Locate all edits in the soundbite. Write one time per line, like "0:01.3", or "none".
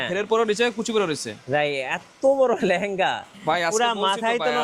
0:03.3

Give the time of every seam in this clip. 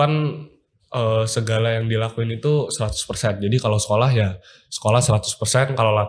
none

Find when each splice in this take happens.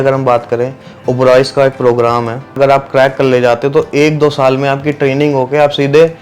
0:02.5

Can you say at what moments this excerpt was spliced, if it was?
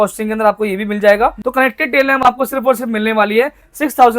0:01.4

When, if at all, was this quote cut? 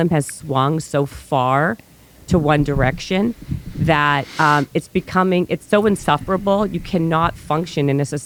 none

